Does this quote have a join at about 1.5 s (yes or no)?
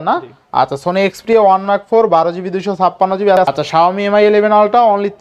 no